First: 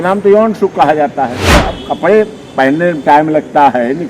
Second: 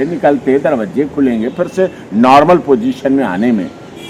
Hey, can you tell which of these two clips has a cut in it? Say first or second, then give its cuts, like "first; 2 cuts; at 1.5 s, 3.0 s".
first; 1 cut; at 1.6 s